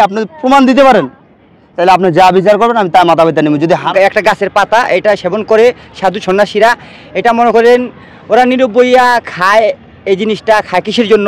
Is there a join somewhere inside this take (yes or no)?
yes